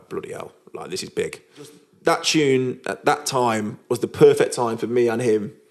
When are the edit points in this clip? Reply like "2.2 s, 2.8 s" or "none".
1.8 s